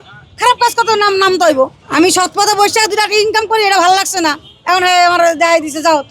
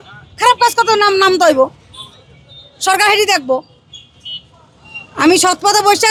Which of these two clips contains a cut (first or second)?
first